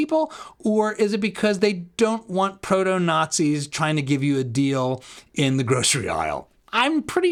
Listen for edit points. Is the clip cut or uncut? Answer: uncut